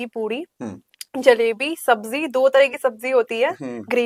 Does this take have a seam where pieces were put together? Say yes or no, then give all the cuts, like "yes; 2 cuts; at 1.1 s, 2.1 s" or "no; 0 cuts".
no; 0 cuts